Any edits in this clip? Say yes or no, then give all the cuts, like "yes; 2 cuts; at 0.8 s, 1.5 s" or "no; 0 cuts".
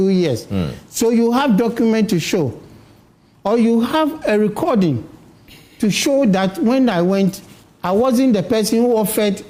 no; 0 cuts